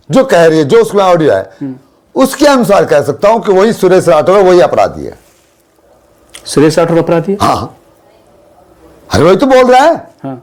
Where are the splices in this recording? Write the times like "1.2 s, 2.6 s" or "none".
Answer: none